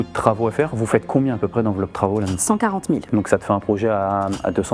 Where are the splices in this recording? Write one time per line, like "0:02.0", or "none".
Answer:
0:03.1